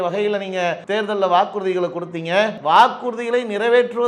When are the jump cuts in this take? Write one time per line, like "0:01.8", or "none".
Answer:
0:00.8
0:02.6